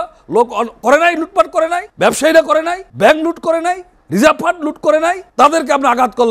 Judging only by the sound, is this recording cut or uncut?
cut